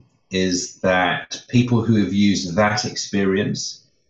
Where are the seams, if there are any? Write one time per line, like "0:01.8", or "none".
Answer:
none